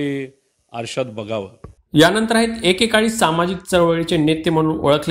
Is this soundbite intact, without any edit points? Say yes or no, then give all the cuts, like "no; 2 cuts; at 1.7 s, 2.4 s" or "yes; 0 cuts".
yes; 0 cuts